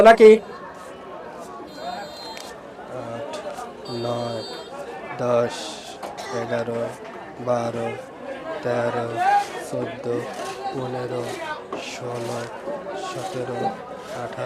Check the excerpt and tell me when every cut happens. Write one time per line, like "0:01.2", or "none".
none